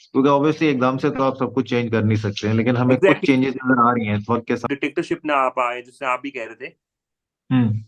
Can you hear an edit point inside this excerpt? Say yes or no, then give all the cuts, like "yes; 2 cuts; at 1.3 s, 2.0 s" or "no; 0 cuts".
yes; 1 cut; at 4.6 s